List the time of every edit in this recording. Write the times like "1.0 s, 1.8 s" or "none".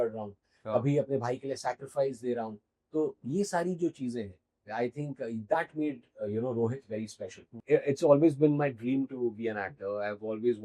7.5 s

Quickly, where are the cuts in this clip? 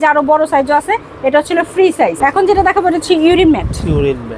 2.2 s

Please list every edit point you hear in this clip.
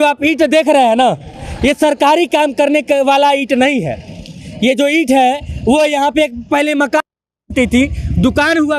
none

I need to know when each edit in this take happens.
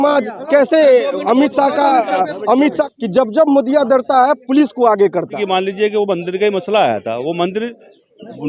2.9 s, 5.4 s

